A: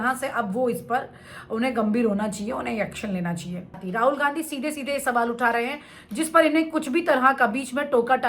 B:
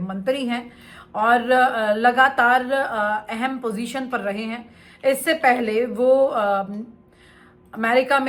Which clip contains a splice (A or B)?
A